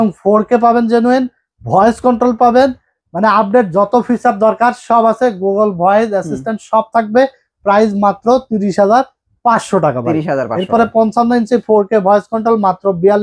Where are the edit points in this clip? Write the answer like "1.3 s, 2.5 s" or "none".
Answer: none